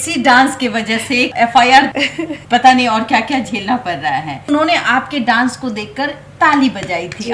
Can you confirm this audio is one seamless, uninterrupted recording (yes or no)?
no